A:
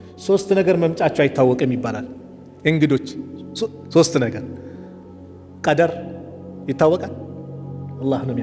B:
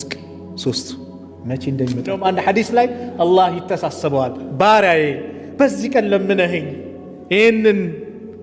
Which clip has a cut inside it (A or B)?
B